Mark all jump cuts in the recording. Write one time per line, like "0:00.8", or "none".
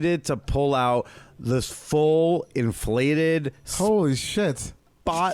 none